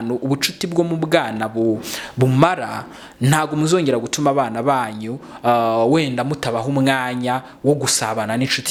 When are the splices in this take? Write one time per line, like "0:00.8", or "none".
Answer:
none